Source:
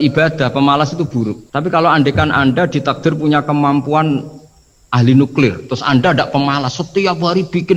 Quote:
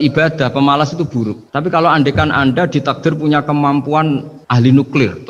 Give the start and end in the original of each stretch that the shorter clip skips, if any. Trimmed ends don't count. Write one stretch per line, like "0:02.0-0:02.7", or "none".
0:04.4-0:04.8